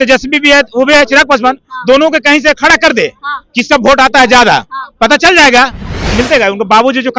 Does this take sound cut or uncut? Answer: cut